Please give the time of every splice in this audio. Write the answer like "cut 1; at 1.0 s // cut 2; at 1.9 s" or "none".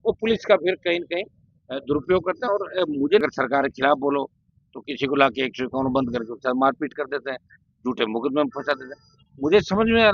cut 1; at 3.2 s